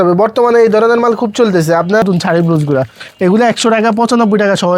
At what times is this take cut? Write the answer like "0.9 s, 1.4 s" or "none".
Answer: 2.0 s

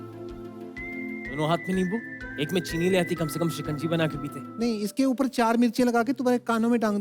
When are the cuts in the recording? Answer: 1.3 s

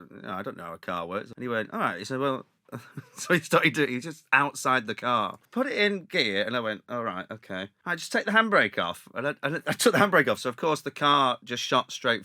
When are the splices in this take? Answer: 1.3 s, 5.5 s, 7.7 s

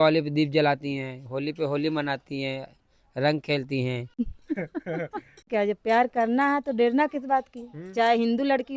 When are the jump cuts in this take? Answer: 4.2 s, 5.5 s

